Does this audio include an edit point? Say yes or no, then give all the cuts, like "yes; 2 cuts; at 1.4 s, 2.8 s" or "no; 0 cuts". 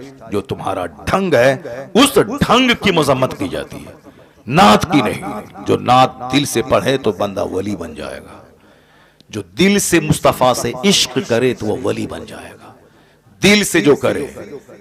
no; 0 cuts